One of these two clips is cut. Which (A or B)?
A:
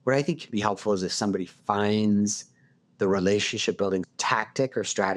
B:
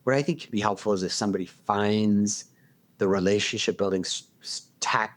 A